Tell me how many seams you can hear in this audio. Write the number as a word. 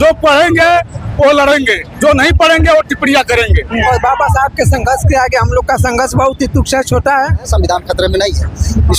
two